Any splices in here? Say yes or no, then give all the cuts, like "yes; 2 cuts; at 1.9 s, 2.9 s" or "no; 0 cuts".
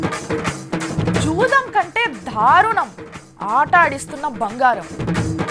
yes; 1 cut; at 1.0 s